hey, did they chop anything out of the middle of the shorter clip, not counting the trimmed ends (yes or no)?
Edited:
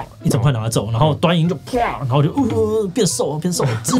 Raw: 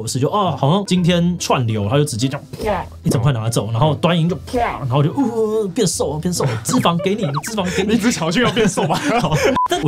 no